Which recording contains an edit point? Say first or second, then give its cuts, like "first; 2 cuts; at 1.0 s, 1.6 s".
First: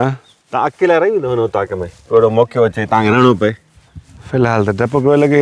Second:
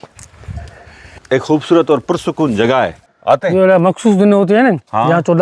second; 2 cuts; at 1.2 s, 3.0 s